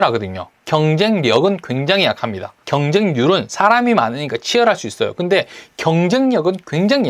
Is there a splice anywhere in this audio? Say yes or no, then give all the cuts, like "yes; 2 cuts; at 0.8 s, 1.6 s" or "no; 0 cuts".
no; 0 cuts